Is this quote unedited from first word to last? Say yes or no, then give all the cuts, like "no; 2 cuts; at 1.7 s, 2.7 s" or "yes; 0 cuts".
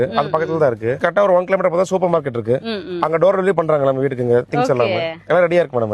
no; 1 cut; at 1.0 s